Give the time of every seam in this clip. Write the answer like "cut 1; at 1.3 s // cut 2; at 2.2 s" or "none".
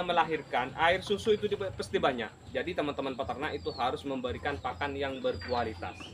cut 1; at 2.4 s